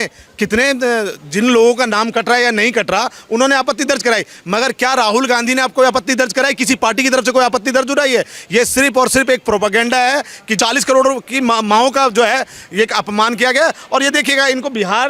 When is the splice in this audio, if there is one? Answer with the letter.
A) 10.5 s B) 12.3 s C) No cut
A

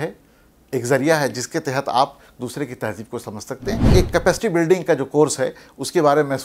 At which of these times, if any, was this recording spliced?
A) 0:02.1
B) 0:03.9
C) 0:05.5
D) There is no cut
B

